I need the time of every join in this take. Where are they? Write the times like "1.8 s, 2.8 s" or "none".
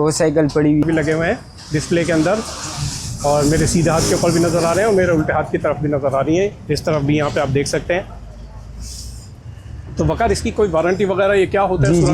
0.8 s, 6.6 s